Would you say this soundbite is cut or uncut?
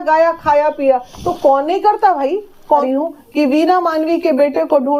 cut